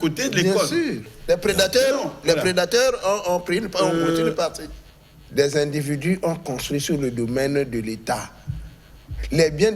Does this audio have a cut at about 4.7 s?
yes; 2 cuts; at 1.1 s, 4.7 s

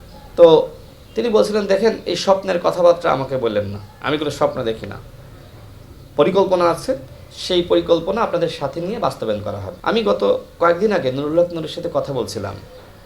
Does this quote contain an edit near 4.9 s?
no; 1 cut; at 9.7 s

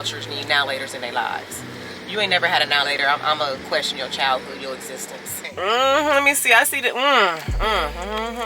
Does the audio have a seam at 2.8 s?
no; 1 cut; at 5.5 s

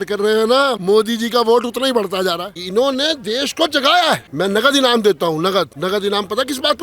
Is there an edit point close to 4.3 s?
yes; 4 cuts; at 0.8 s, 2.6 s, 4.3 s, 5.7 s

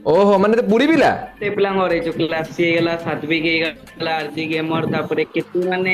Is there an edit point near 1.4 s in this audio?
yes; 1 cut; at 1.4 s

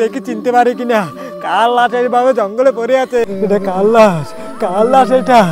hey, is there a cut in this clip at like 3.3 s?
yes; 1 cut; at 3.3 s

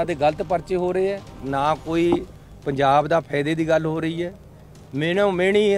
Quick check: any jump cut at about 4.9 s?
no; 1 cut; at 1.4 s

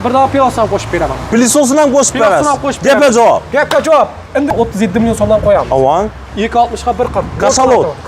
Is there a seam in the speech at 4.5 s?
yes; 1 cut; at 4.5 s

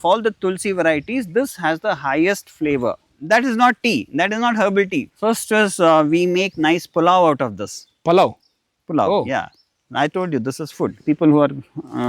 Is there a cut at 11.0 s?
yes; 3 cuts; at 3.1 s, 5.1 s, 11.0 s

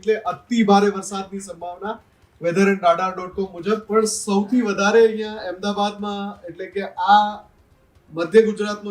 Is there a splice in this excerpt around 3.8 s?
yes; 1 cut; at 3.8 s

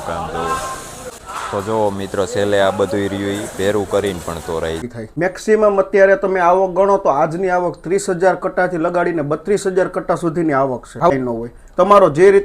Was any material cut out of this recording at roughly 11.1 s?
yes; 3 cuts; at 1.0 s, 4.9 s, 11.1 s

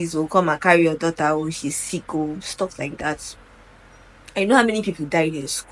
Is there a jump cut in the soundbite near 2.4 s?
no; 0 cuts

